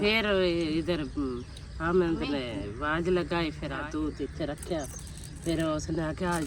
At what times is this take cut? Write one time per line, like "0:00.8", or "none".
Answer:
0:03.8